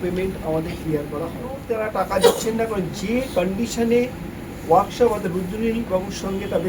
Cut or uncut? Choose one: cut